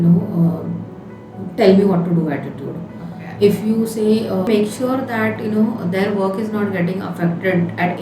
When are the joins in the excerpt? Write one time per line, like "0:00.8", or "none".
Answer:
0:04.5